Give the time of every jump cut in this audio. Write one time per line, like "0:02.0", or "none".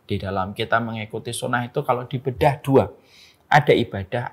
none

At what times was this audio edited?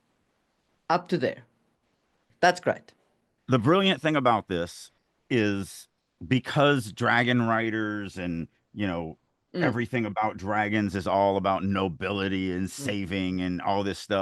0:02.2

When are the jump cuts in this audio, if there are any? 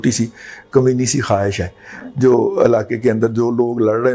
none

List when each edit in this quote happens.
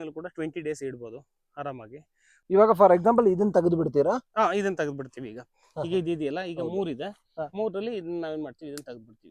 0:02.3

